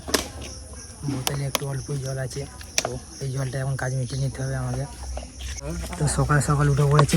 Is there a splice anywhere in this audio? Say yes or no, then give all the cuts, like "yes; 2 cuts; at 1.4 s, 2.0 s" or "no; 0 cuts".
yes; 1 cut; at 5.6 s